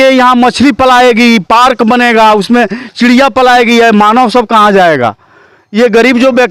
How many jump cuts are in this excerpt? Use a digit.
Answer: 0